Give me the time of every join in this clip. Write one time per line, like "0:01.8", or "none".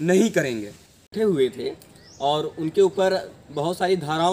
0:01.0